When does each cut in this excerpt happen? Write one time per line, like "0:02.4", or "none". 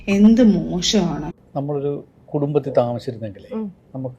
0:01.1